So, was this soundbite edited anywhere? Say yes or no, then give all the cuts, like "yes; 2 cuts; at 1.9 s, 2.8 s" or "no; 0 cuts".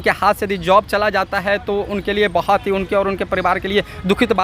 no; 0 cuts